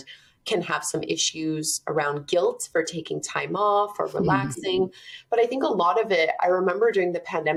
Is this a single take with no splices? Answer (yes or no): yes